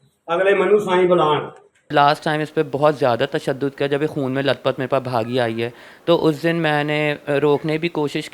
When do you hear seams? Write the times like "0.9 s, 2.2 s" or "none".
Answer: 1.9 s